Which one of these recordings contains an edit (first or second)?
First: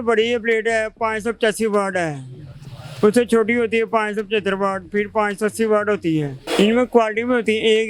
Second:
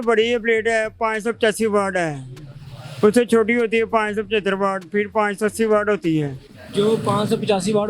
first